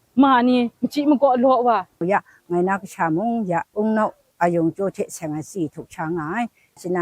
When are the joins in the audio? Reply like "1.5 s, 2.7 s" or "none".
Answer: 2.0 s, 3.7 s